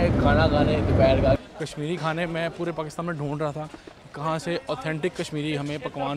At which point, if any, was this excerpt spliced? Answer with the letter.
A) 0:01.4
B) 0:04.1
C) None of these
A